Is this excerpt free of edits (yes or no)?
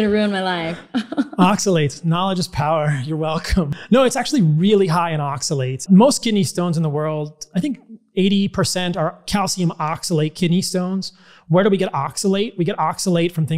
no